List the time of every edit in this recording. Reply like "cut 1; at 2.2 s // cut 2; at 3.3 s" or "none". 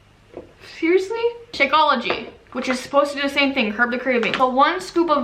cut 1; at 1.4 s // cut 2; at 4.3 s